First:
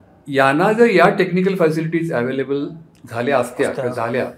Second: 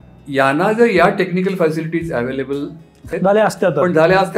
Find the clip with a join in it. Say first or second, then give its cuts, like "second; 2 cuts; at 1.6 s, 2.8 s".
second; 1 cut; at 3.1 s